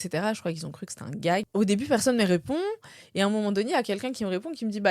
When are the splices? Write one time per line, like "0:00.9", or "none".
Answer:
0:01.5